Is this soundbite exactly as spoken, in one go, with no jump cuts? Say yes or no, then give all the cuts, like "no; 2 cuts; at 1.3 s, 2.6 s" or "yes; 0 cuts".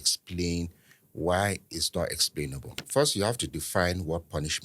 no; 1 cut; at 2.8 s